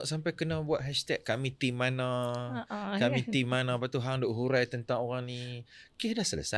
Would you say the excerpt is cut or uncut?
uncut